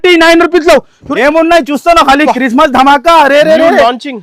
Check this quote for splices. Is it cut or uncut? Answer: cut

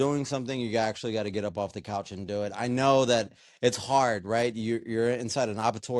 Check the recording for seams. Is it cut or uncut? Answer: uncut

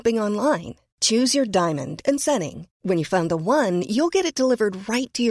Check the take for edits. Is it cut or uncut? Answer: uncut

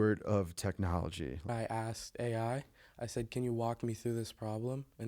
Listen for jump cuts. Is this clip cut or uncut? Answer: cut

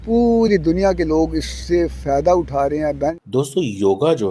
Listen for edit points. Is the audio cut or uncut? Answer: cut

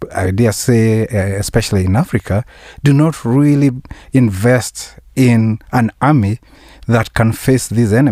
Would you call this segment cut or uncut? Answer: uncut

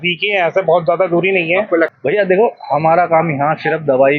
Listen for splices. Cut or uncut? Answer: cut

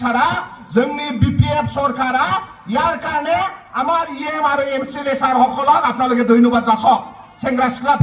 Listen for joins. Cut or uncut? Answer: uncut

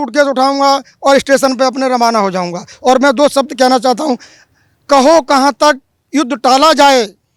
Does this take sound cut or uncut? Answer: uncut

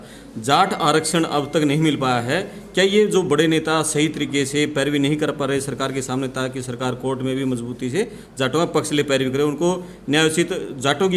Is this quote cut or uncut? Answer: uncut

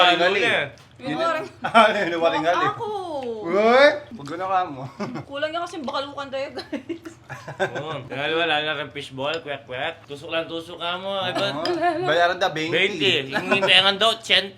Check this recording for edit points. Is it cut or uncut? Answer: cut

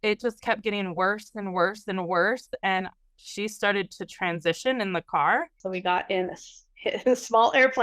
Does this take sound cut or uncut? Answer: cut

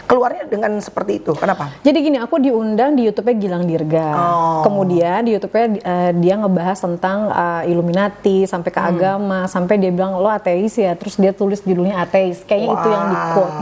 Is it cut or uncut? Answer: uncut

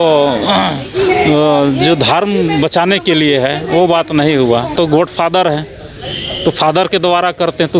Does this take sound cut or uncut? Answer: cut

